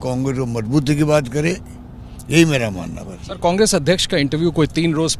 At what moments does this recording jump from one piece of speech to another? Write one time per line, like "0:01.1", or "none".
none

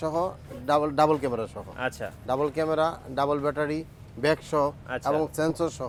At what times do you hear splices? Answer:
none

